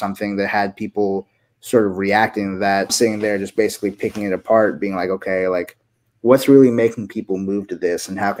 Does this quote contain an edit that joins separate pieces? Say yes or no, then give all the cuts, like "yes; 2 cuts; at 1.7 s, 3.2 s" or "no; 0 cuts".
yes; 1 cut; at 2.9 s